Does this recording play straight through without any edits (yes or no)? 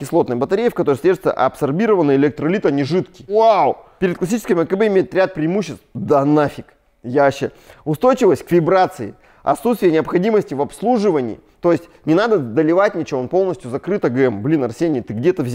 yes